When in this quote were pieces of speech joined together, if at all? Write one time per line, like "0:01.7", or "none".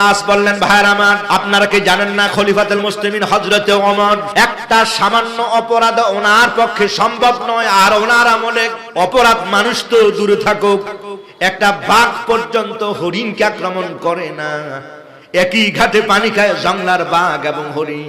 0:01.2
0:04.3
0:08.8